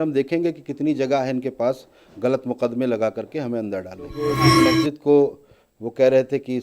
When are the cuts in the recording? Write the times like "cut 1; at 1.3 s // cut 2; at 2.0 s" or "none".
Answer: cut 1; at 4.4 s